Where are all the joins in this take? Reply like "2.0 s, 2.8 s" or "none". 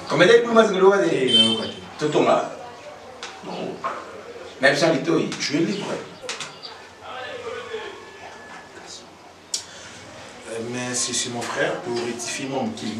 none